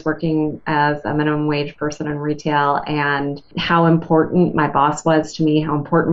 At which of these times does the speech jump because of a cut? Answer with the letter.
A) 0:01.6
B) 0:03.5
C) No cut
B